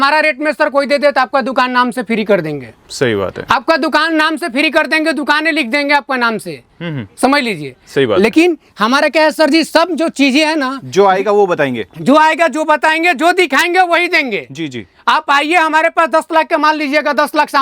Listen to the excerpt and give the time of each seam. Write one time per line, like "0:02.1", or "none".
none

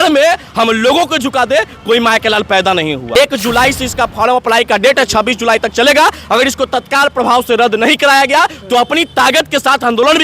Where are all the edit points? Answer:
0:03.2

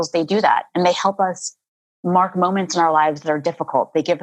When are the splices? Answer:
none

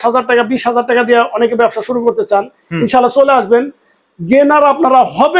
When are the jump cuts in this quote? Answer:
none

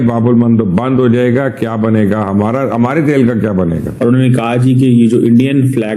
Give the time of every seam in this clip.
0:03.9

